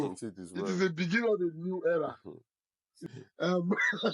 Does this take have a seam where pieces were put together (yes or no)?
yes